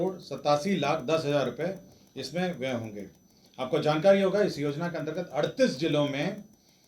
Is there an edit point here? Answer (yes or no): no